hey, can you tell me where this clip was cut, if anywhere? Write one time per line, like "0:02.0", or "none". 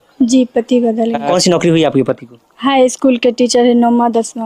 0:01.3

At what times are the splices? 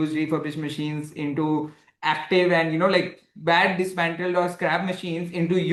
none

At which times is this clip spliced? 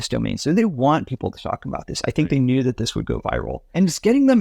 0:03.2

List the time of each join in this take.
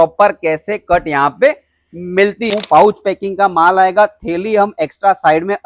0:02.5

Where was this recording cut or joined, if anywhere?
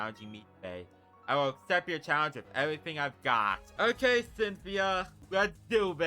0:03.7
0:05.1

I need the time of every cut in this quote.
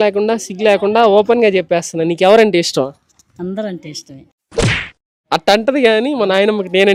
none

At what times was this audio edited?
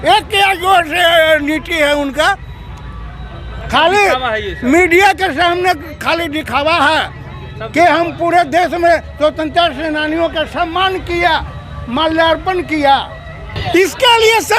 0:13.6

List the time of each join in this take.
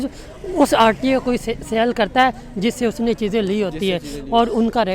none

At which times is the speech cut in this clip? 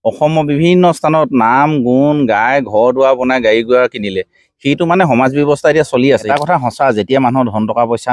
0:06.3

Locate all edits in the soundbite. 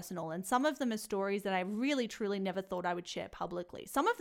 none

